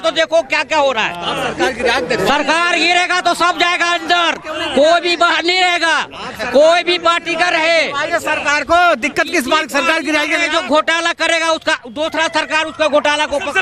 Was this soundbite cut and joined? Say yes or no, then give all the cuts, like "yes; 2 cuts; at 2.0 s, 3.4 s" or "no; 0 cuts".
no; 0 cuts